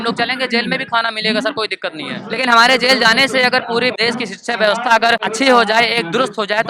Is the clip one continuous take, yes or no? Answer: no